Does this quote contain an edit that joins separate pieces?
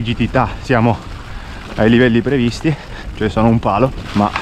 no; 0 cuts

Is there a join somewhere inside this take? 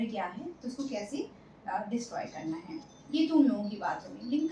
no; 0 cuts

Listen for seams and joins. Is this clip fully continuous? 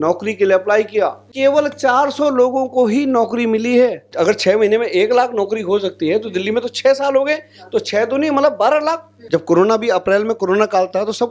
no; 3 cuts; at 1.2 s, 4.0 s, 9.1 s

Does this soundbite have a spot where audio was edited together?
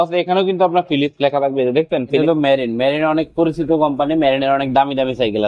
yes; 1 cut; at 2.2 s

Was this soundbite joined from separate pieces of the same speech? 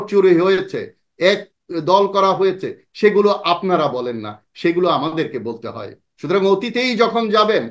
no; 0 cuts

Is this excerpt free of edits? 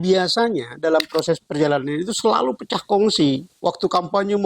no; 1 cut; at 3.5 s

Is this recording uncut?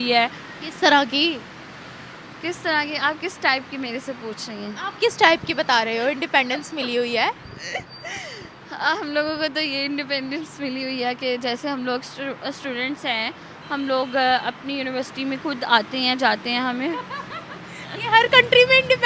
yes; 0 cuts

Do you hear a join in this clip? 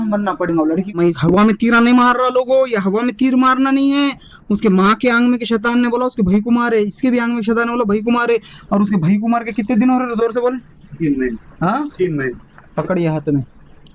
yes; 1 cut; at 1.0 s

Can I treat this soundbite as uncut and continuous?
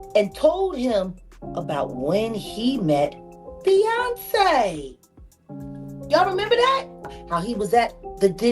no; 1 cut; at 7.2 s

